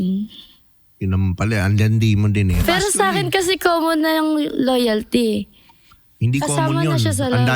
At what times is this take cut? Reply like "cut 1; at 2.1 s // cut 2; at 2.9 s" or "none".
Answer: cut 1; at 2.6 s